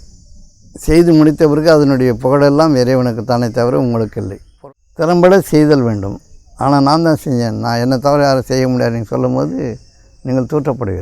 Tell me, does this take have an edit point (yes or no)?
yes